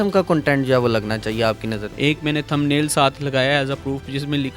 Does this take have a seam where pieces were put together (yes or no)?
yes